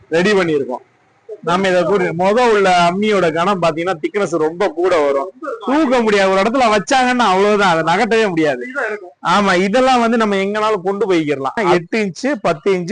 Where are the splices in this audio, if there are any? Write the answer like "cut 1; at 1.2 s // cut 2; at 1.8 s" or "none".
cut 1; at 11.6 s

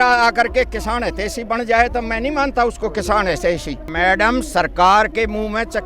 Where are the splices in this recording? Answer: cut 1; at 3.8 s

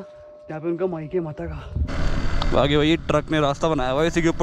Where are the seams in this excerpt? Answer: cut 1; at 1.9 s

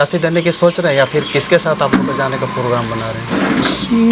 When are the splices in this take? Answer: none

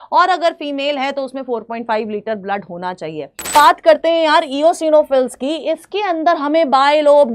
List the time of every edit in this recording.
cut 1; at 3.6 s

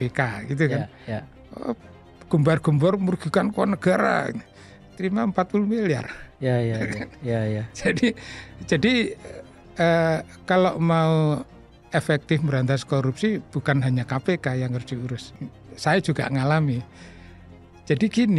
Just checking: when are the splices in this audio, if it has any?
cut 1; at 15.3 s

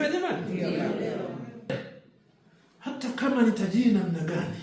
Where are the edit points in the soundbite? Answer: cut 1; at 1.7 s

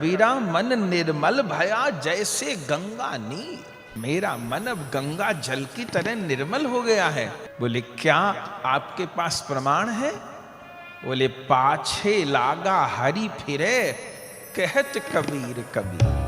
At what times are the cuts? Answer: cut 1; at 3.8 s // cut 2; at 7.4 s

